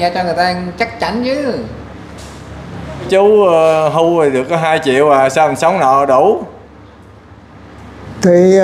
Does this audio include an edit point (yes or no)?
yes